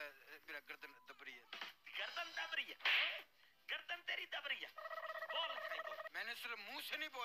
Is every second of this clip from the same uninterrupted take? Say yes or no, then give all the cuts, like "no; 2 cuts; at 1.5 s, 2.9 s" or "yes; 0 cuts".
no; 1 cut; at 6.1 s